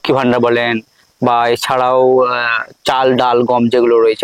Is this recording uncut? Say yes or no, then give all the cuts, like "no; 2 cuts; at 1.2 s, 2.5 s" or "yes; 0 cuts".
yes; 0 cuts